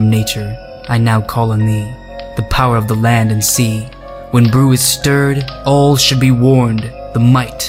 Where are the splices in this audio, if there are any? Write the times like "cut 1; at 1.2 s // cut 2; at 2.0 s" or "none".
none